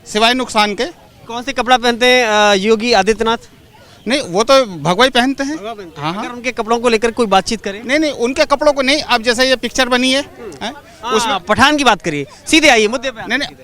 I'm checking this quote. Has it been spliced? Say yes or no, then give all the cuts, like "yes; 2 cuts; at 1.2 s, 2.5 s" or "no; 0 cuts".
no; 0 cuts